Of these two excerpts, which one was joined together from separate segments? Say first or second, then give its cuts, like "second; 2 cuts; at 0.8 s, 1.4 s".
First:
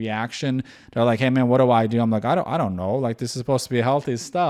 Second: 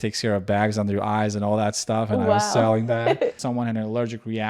second; 1 cut; at 3.4 s